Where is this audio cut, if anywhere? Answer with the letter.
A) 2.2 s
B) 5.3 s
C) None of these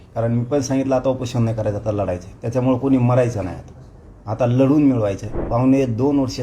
B